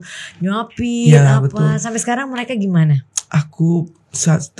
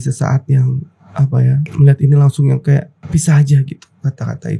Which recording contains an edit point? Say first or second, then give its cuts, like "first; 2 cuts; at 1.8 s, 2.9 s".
second; 2 cuts; at 1.7 s, 3.0 s